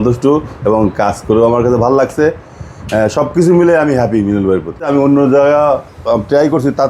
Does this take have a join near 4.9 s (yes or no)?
yes